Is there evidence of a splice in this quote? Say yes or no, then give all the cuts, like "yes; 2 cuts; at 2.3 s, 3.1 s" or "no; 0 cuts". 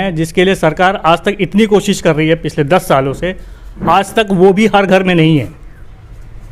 no; 0 cuts